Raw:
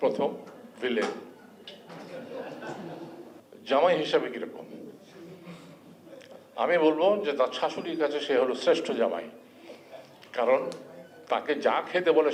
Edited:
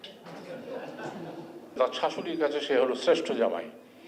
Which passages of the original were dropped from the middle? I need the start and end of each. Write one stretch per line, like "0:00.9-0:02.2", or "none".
0:03.4-0:07.3

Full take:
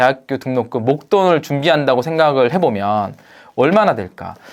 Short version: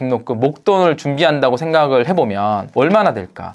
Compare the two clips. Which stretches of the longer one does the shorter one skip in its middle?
0:03.1-0:03.5

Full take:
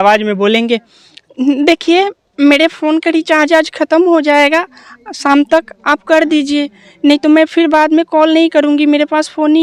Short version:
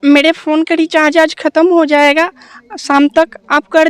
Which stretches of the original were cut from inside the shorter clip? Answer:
none

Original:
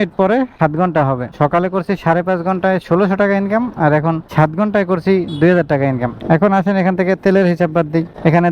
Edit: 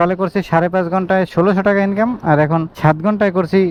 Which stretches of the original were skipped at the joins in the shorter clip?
none

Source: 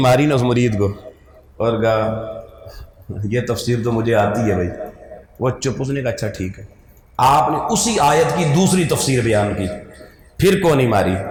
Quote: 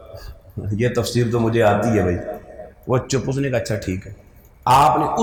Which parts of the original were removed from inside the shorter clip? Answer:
none

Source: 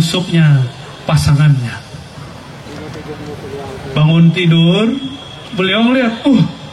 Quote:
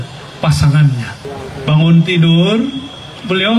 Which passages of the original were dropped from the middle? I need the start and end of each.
0:01.9-0:03.5

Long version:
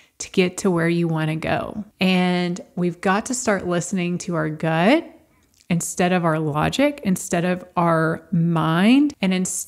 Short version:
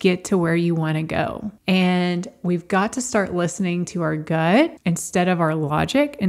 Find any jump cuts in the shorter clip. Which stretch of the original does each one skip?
0:05.1-0:05.6

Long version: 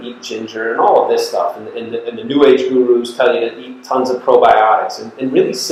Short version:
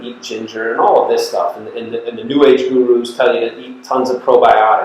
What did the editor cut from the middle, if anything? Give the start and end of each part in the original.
none

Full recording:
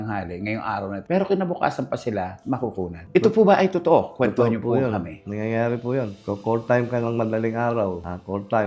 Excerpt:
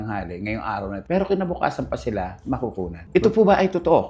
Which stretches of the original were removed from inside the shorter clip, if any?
none

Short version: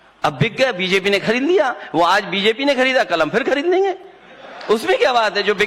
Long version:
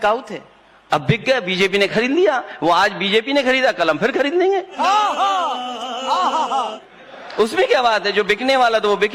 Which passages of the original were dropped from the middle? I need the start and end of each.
0:04.7-0:06.7

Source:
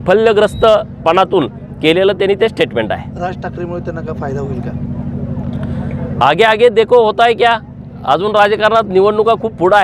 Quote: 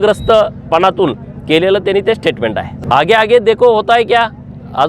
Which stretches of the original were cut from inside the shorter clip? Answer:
0:03.1-0:06.1

